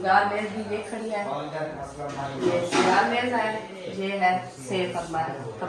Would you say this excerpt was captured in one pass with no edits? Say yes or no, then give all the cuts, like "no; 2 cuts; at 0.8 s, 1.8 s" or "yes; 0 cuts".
yes; 0 cuts